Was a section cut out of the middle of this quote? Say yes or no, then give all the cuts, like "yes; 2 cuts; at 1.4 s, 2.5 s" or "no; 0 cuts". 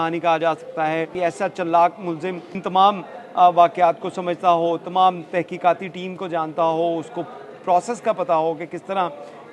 yes; 1 cut; at 1.1 s